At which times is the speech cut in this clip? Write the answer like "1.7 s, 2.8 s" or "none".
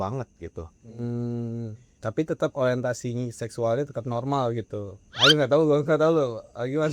5.0 s